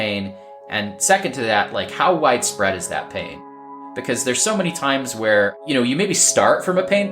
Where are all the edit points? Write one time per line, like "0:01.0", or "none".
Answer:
0:03.4
0:05.6